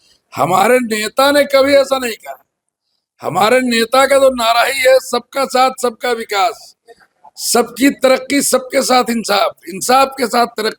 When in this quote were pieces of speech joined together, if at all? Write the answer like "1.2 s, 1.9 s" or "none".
none